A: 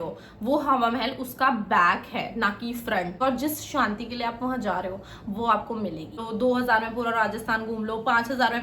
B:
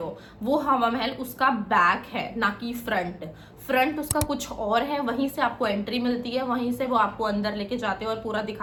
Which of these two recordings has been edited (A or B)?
A